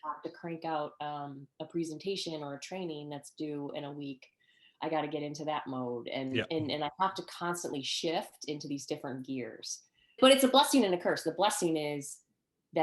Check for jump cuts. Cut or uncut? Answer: cut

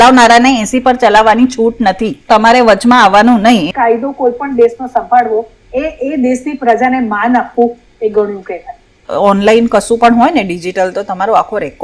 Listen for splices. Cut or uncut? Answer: cut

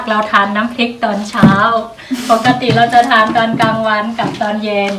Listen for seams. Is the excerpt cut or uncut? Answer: uncut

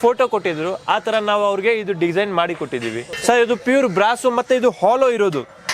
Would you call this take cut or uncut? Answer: cut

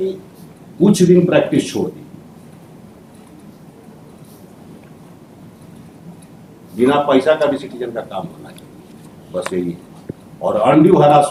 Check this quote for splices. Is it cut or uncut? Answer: uncut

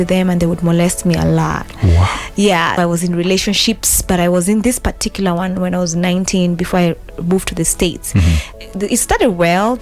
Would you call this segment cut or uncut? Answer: cut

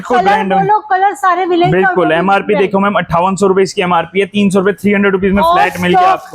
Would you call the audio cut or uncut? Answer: uncut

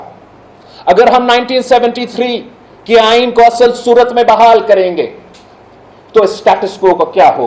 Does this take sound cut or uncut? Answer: uncut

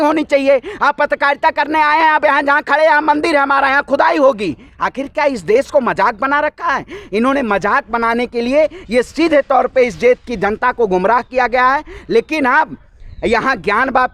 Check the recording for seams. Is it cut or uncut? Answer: uncut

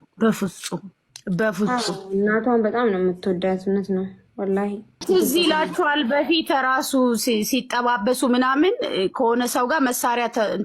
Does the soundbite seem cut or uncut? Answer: uncut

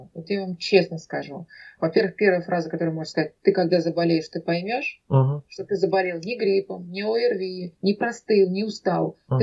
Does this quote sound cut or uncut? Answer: uncut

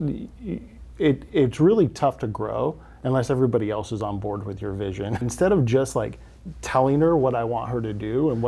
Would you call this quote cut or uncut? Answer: cut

